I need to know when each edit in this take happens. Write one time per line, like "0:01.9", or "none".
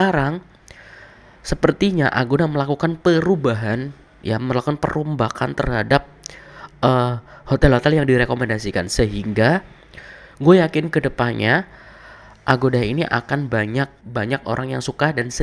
0:14.0

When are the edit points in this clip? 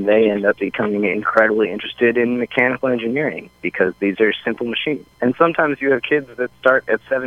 0:05.1

